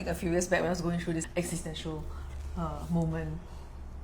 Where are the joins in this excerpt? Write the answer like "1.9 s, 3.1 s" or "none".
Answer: 1.2 s